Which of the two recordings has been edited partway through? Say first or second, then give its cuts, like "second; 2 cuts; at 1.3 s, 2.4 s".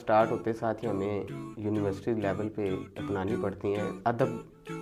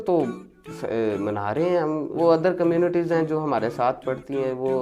second; 1 cut; at 2.1 s